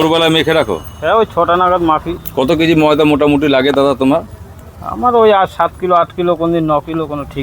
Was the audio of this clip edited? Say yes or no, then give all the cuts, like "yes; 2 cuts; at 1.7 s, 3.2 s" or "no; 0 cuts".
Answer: yes; 1 cut; at 2.2 s